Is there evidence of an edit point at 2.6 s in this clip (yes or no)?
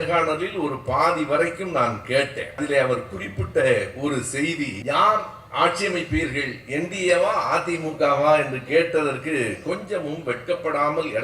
yes